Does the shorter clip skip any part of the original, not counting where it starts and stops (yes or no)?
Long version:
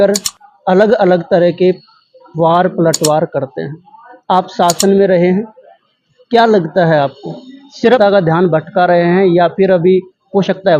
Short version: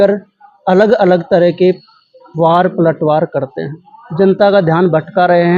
yes